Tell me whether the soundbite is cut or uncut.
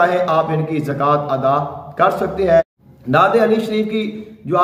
cut